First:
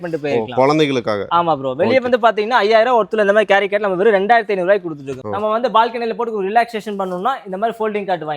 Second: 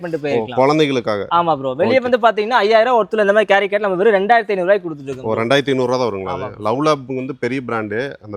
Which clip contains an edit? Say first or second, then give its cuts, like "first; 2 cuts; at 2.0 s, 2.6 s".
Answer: first; 1 cut; at 5.1 s